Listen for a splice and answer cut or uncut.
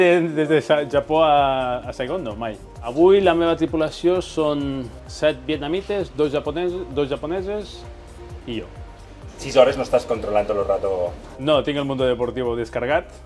uncut